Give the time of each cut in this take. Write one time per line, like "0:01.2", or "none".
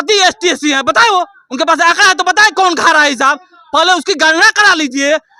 none